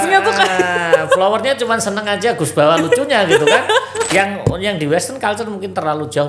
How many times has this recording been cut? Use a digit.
1